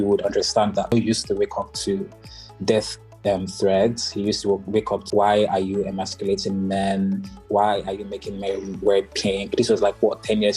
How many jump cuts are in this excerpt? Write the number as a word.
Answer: two